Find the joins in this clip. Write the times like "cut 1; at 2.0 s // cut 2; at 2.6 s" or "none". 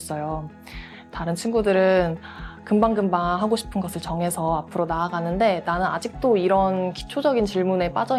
none